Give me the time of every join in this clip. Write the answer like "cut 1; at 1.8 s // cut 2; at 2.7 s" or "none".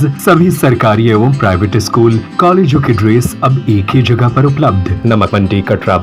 cut 1; at 5.1 s